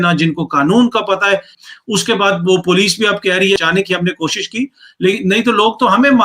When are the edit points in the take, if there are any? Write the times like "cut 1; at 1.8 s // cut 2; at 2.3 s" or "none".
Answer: cut 1; at 1.6 s // cut 2; at 3.6 s